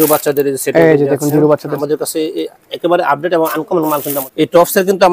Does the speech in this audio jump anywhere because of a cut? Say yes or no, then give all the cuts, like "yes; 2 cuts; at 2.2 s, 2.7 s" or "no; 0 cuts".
yes; 2 cuts; at 1.8 s, 4.2 s